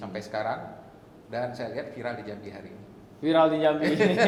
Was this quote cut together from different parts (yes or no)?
no